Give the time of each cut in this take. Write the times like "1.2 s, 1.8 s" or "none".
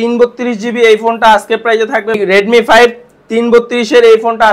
2.2 s